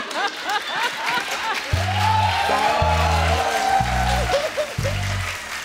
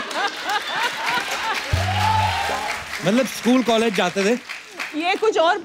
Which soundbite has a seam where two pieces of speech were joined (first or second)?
second